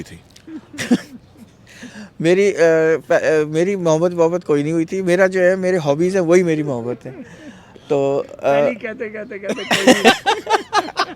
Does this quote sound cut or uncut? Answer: uncut